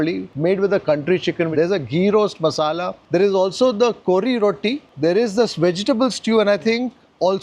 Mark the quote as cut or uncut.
uncut